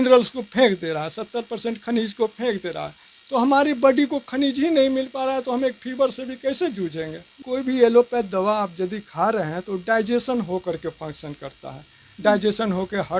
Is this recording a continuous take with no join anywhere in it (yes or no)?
no